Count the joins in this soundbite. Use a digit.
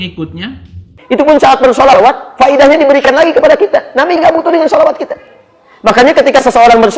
1